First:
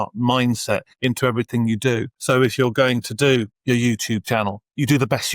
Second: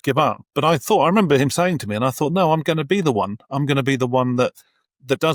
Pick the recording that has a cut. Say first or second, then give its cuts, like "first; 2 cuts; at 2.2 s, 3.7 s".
first; 3 cuts; at 0.9 s, 2.1 s, 3.5 s